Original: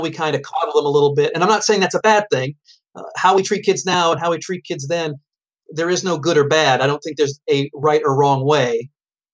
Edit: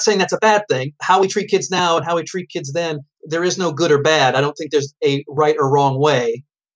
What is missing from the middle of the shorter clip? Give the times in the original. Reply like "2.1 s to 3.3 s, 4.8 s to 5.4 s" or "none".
2.5 s to 3.1 s, 5.3 s to 5.6 s